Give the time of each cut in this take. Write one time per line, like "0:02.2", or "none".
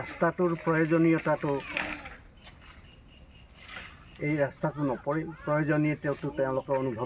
none